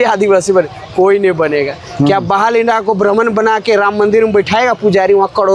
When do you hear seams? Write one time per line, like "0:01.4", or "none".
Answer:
none